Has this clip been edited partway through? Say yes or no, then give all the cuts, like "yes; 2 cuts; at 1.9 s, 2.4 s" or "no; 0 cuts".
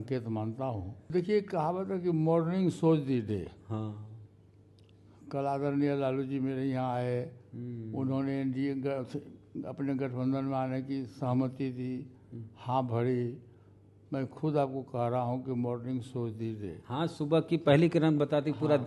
yes; 1 cut; at 1.1 s